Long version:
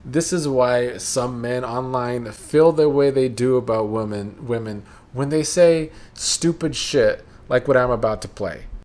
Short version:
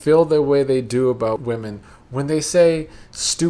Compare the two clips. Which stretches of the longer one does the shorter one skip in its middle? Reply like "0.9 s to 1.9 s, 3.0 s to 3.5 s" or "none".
3.9 s to 4.4 s